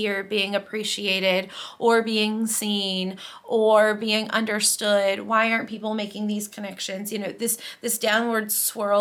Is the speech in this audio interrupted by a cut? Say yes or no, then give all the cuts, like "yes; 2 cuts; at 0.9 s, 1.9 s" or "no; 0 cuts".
no; 0 cuts